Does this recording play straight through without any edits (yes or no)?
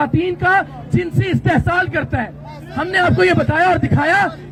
yes